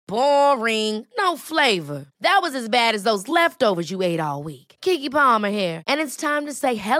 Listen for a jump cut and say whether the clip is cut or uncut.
uncut